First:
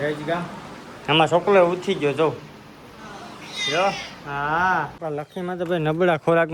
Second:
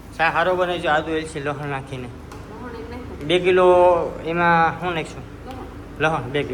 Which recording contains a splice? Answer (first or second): first